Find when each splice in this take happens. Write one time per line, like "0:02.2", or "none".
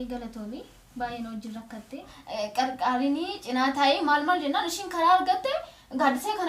0:02.2